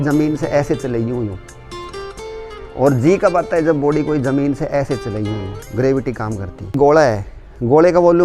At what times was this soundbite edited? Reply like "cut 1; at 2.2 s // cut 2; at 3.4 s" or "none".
cut 1; at 6.7 s